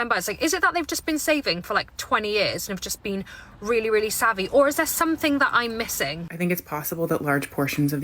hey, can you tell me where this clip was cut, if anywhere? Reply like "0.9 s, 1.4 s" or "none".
6.3 s